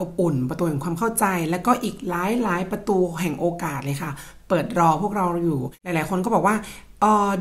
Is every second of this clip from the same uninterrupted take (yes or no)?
no